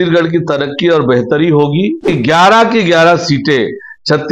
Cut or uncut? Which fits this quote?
cut